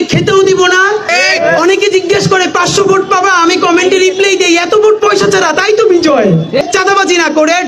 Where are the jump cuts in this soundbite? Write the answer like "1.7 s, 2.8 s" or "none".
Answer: 1.1 s, 6.6 s